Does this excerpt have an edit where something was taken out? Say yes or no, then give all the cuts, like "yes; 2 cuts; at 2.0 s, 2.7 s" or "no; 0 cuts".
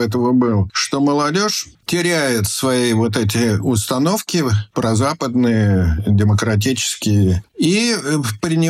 no; 0 cuts